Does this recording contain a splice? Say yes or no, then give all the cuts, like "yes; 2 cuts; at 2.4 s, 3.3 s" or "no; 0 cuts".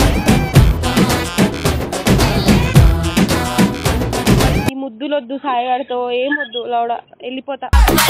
yes; 1 cut; at 4.7 s